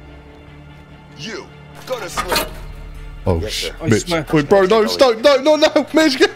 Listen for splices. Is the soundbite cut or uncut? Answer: uncut